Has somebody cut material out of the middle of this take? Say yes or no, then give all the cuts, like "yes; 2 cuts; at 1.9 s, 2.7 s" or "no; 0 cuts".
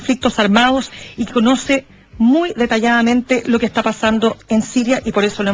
no; 0 cuts